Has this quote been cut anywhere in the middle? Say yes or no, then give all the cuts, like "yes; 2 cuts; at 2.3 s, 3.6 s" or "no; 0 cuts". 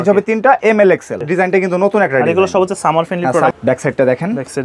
yes; 2 cuts; at 1.2 s, 3.5 s